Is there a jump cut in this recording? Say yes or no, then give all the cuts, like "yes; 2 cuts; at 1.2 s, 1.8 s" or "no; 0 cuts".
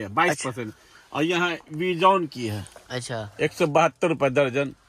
no; 0 cuts